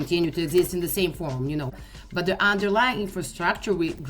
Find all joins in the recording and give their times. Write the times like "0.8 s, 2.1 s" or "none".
1.7 s